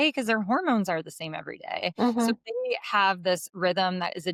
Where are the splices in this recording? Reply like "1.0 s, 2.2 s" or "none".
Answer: none